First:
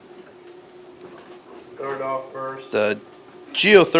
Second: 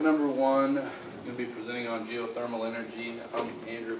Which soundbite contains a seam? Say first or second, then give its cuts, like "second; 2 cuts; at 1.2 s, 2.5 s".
second; 1 cut; at 2.0 s